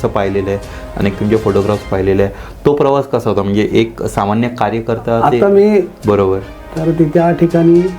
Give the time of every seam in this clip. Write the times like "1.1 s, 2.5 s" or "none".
5.9 s